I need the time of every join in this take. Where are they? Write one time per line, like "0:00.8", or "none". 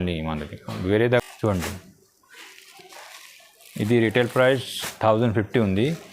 0:01.2